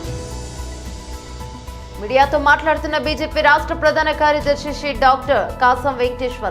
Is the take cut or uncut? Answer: uncut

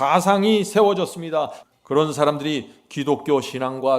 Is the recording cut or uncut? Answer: cut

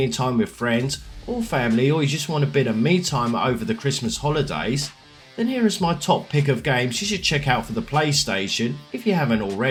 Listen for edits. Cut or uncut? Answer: uncut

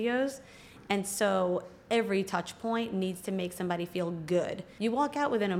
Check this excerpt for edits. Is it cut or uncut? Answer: cut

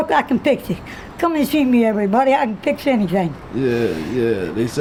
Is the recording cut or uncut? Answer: uncut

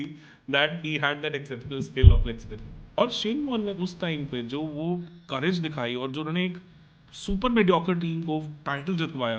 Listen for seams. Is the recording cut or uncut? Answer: cut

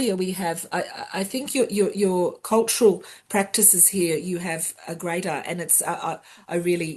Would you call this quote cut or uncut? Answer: uncut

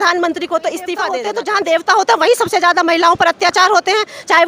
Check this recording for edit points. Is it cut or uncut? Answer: cut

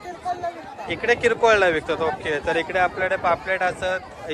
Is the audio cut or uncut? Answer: uncut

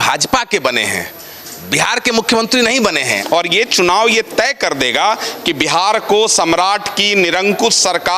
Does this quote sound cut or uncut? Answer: cut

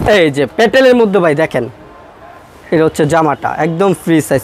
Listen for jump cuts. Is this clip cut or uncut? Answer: uncut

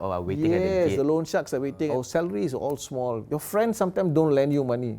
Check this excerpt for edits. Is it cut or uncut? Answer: cut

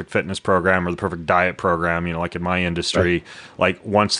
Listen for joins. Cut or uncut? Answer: uncut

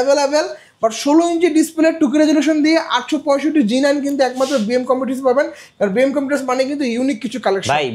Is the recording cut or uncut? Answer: uncut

